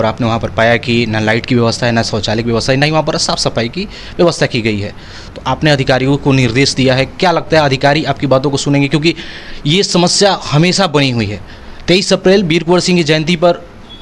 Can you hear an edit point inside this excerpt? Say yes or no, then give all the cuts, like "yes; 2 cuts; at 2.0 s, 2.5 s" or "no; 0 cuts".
no; 0 cuts